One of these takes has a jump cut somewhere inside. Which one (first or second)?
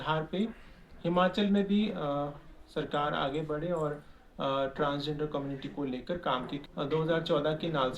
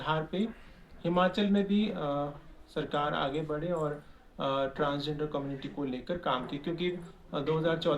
first